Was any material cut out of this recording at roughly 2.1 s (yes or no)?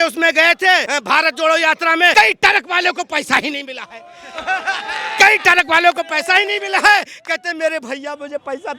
yes